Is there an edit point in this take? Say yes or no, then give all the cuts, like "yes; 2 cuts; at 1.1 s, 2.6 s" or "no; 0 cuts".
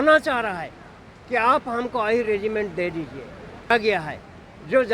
yes; 1 cut; at 3.7 s